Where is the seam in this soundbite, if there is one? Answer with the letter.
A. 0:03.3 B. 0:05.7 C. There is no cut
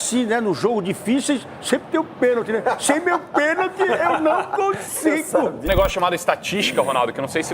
B